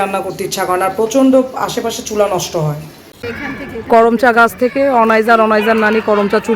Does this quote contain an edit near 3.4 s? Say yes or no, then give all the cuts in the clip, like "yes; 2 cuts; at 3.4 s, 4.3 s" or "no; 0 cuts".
yes; 1 cut; at 3.4 s